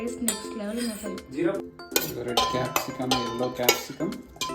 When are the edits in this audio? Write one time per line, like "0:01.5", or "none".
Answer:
0:01.8